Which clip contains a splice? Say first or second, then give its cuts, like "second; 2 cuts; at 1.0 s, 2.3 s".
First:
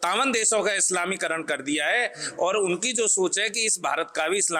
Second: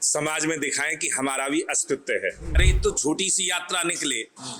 second; 1 cut; at 2.6 s